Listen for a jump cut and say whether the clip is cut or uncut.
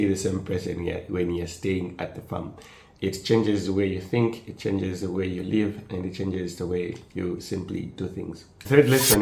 uncut